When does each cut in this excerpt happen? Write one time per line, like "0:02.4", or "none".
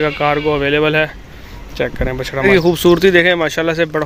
0:02.4